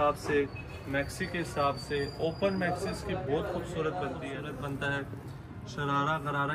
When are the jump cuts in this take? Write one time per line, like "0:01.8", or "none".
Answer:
0:04.3